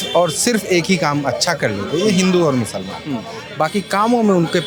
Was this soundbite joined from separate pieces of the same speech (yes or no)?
no